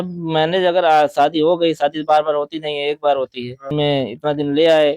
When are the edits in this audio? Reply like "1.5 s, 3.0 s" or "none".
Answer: 3.7 s